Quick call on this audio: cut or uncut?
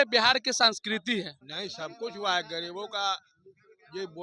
cut